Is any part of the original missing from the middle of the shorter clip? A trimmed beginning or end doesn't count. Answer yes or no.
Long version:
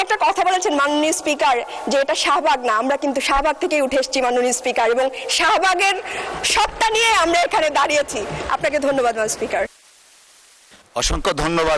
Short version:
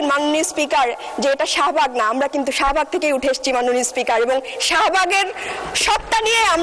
no